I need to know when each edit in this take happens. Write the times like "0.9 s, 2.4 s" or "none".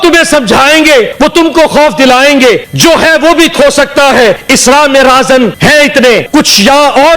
1.1 s, 2.7 s, 4.4 s, 5.6 s, 6.3 s